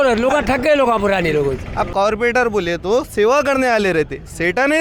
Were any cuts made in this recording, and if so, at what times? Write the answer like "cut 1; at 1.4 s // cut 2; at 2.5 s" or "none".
cut 1; at 1.6 s